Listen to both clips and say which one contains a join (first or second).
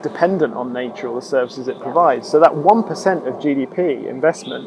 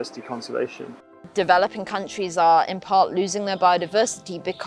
second